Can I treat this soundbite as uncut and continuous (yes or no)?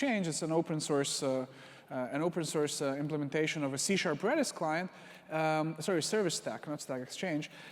no